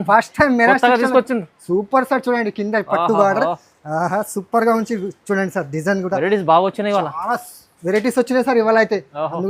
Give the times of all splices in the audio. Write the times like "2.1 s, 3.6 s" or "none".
none